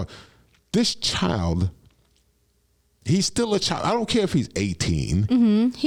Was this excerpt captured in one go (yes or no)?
yes